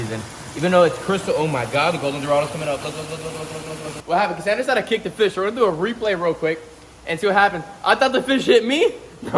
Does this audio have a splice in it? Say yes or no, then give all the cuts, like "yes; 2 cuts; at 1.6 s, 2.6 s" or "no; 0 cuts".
yes; 1 cut; at 4.0 s